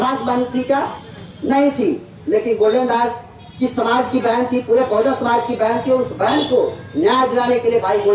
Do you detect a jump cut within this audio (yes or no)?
no